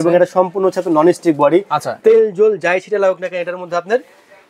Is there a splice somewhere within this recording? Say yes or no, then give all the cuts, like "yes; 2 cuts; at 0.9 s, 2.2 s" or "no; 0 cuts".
no; 0 cuts